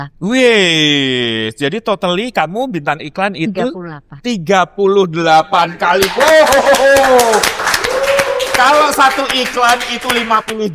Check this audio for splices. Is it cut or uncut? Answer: uncut